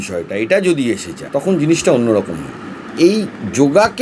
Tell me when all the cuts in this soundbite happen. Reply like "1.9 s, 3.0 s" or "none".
1.1 s, 2.9 s

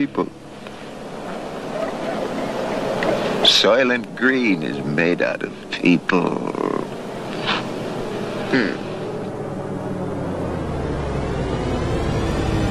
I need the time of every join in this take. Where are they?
4.4 s

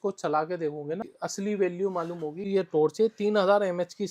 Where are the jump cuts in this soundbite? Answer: 1.1 s, 2.5 s

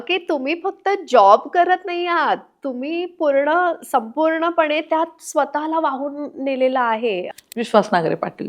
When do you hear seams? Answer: 7.3 s

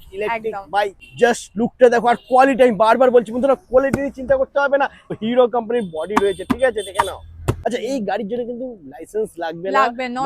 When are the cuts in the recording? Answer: 1.0 s, 5.2 s, 7.6 s

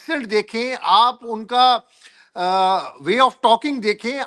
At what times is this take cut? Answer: none

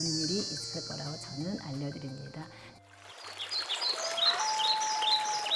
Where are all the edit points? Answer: 2.7 s

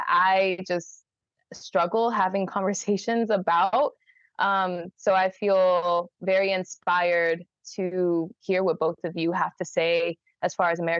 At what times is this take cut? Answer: none

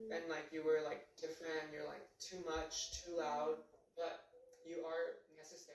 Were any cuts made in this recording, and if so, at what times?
none

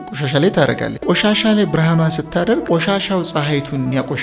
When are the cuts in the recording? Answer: 0.9 s, 2.6 s

